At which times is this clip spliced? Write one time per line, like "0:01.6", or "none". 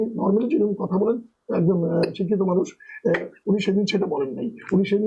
none